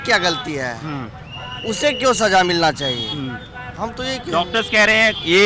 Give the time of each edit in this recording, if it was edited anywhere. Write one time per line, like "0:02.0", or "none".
none